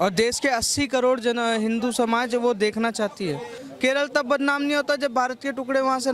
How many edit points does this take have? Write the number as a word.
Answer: one